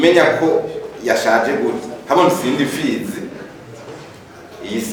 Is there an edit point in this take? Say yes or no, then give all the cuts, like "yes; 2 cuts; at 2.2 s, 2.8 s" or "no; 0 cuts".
no; 0 cuts